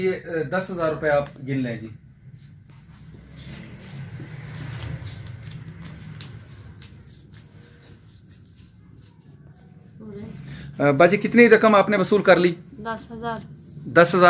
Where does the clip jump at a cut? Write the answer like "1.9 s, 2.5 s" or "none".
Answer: none